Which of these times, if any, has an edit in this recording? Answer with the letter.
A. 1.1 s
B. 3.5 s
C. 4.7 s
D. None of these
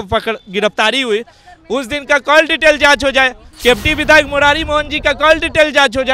D